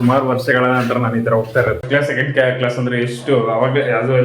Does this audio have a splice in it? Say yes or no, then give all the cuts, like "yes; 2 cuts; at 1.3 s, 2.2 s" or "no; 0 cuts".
yes; 1 cut; at 1.8 s